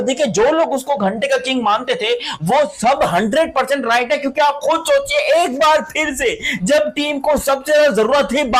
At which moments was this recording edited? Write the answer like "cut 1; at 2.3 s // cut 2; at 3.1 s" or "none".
none

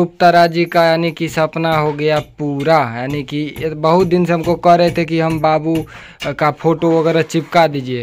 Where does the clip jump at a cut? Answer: none

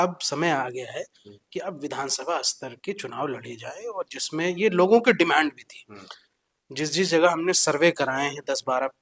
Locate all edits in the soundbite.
none

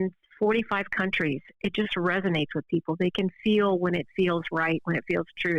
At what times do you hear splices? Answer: none

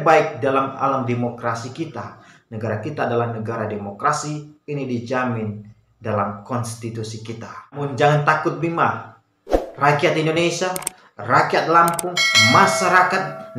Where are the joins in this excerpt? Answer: cut 1; at 7.8 s

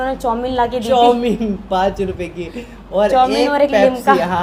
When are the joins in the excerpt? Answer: none

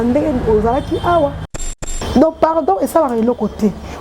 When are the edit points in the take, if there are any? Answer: cut 1; at 1.7 s

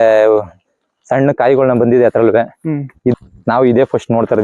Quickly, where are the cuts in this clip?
cut 1; at 3.1 s

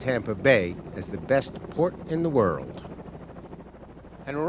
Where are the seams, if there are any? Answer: cut 1; at 1.3 s

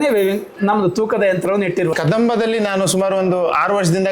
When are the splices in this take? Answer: cut 1; at 1.9 s

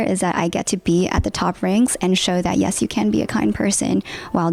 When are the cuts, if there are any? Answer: none

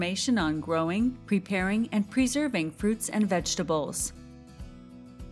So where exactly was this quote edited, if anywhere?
cut 1; at 4.0 s

